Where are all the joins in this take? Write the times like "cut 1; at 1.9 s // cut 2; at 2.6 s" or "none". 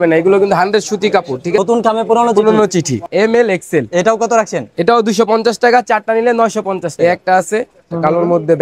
cut 1; at 1.6 s // cut 2; at 3.1 s // cut 3; at 6.9 s